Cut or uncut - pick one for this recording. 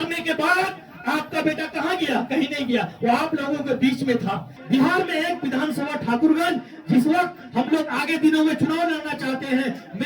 cut